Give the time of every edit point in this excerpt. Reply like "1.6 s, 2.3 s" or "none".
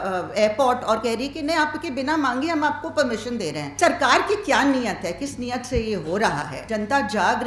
3.8 s, 6.6 s